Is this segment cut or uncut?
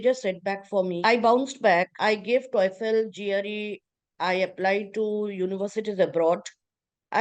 cut